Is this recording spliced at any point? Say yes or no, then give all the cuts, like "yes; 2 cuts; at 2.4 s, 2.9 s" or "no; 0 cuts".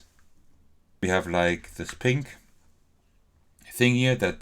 yes; 1 cut; at 1.0 s